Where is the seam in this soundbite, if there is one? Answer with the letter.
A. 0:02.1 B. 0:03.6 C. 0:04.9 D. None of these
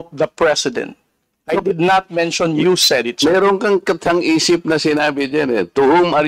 D